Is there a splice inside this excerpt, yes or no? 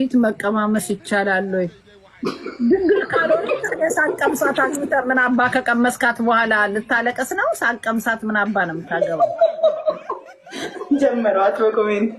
no